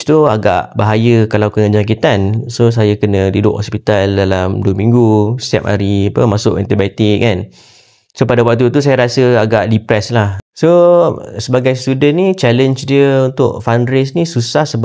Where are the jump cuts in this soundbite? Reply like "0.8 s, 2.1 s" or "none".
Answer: 10.4 s